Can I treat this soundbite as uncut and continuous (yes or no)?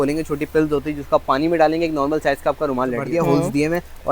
no